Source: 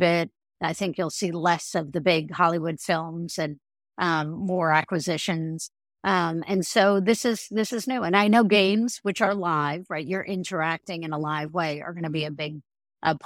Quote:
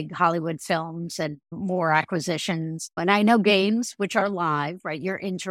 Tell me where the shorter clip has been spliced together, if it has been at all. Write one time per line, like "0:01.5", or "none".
0:01.5
0:03.0